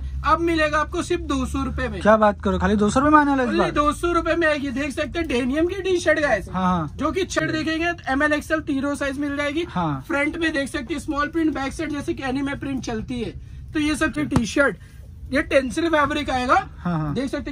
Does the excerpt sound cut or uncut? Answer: cut